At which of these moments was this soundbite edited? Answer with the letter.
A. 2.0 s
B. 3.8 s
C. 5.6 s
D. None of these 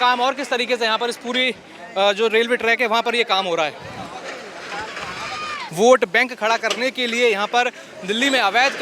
C